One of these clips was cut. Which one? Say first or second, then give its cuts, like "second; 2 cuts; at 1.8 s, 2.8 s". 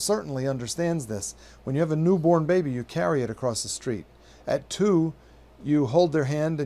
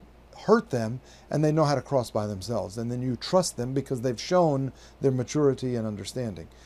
first; 1 cut; at 4.9 s